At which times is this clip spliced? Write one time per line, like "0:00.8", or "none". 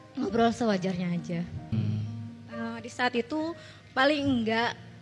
0:01.7